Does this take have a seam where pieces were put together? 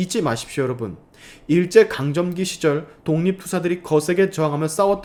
no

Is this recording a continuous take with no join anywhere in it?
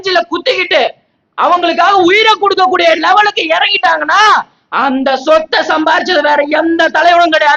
yes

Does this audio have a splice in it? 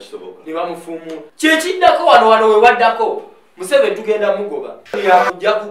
yes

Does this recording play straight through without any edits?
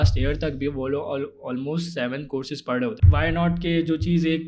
no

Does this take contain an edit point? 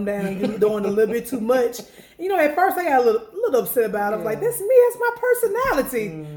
no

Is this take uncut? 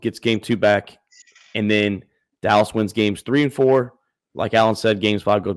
yes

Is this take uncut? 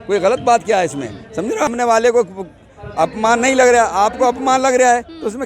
no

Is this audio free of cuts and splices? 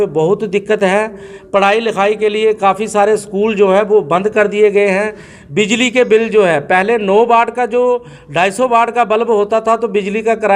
yes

